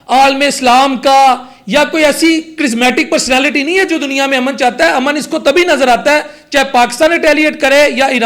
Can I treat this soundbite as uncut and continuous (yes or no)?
yes